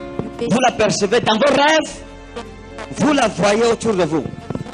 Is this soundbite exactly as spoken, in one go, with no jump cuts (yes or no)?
yes